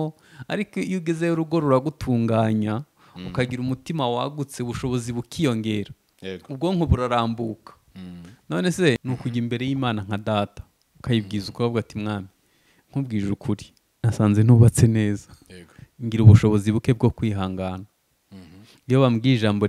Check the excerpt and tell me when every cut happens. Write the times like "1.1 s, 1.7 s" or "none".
9.0 s